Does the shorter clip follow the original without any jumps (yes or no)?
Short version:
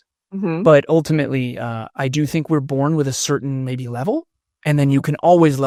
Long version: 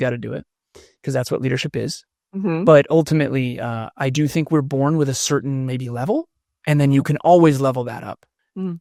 yes